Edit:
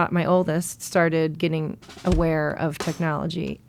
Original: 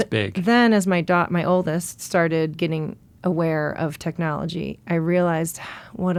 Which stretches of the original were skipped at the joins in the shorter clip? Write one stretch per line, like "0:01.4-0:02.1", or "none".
none